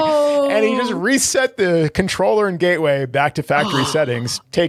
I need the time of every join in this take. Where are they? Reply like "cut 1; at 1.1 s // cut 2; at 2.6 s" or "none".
none